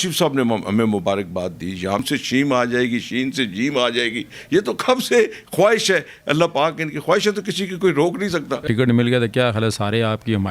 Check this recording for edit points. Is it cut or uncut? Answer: cut